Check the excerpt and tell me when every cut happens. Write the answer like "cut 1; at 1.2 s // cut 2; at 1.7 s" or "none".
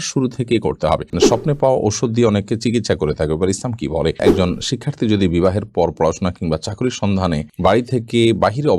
cut 1; at 1.1 s // cut 2; at 4.2 s // cut 3; at 7.5 s